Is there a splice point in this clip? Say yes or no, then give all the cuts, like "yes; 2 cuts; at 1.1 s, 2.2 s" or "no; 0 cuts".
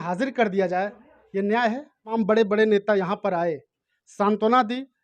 yes; 1 cut; at 2.1 s